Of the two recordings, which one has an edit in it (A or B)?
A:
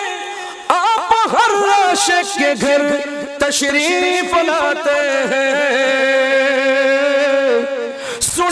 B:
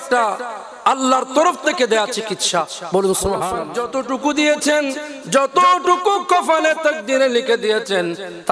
B